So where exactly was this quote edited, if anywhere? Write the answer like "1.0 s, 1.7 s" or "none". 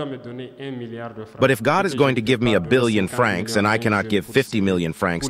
1.2 s